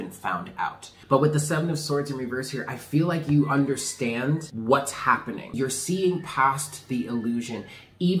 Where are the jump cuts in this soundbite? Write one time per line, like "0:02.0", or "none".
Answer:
0:00.9
0:04.5
0:05.5